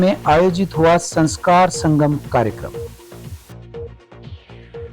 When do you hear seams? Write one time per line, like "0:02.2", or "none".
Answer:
0:02.6